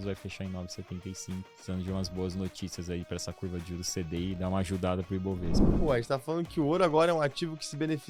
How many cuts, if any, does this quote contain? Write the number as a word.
two